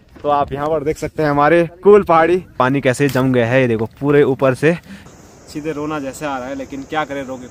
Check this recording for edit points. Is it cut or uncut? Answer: cut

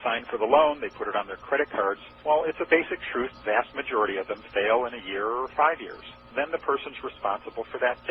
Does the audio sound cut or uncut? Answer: cut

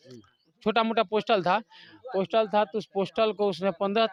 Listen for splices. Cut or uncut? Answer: uncut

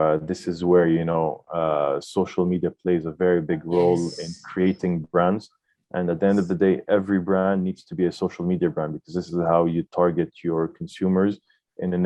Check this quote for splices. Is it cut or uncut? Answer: uncut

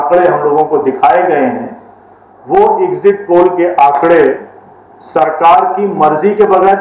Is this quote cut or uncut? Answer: uncut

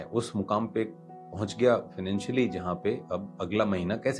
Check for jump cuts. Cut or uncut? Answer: uncut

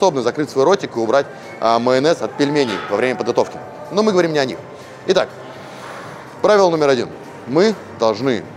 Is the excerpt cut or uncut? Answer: uncut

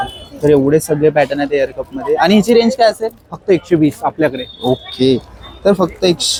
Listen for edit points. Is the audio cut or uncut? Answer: uncut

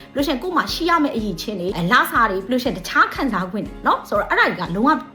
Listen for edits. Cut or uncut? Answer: uncut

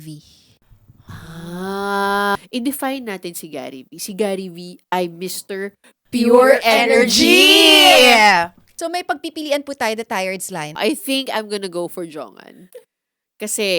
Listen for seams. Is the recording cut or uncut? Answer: cut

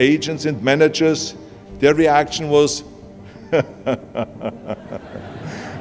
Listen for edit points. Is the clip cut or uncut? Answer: uncut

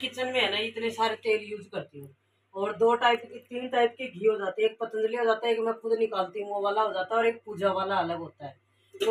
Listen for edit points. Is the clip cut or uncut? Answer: uncut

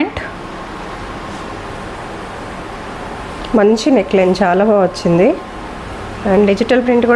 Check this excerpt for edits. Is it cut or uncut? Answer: uncut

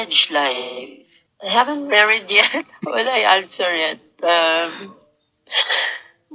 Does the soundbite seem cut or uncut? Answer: uncut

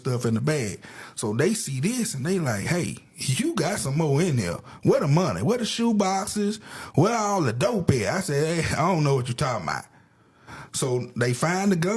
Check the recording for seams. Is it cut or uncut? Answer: uncut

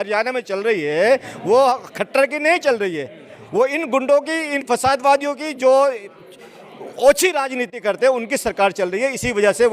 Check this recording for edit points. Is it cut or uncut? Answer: uncut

